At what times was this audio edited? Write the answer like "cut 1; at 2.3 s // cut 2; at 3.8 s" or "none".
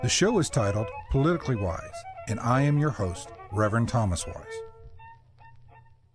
cut 1; at 4.3 s